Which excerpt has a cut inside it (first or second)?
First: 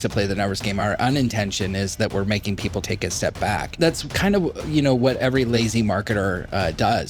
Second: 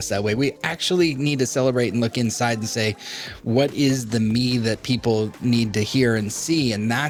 first